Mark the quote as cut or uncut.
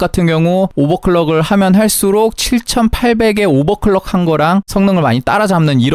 uncut